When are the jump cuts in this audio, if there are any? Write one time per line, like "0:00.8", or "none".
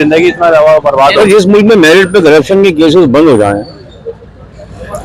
0:01.2